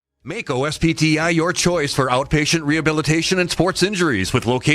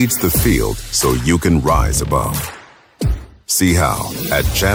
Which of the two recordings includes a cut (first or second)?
first